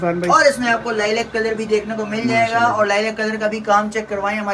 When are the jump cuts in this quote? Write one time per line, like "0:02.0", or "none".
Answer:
none